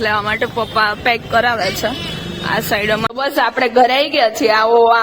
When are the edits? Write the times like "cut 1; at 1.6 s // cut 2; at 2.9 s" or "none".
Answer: cut 1; at 3.1 s